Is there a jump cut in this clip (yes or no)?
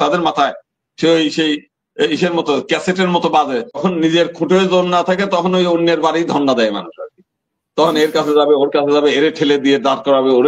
yes